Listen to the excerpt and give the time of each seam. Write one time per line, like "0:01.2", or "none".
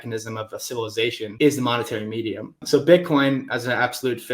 0:01.3
0:02.6

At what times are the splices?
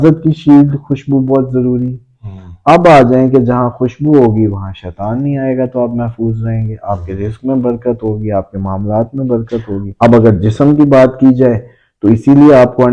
0:09.9

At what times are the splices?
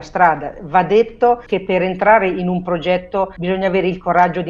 0:01.5
0:03.4

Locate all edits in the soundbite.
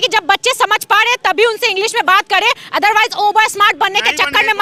none

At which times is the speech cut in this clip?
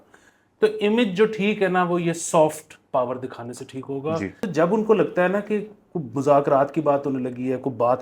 0:04.5

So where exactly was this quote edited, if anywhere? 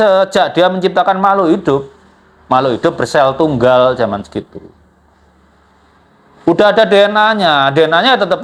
none

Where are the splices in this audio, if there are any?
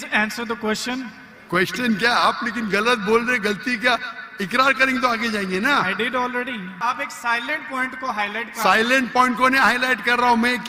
0:06.8

